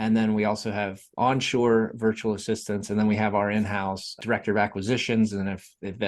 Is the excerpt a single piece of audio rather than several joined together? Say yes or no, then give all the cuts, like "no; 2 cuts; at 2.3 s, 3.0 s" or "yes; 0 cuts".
no; 2 cuts; at 1.0 s, 4.1 s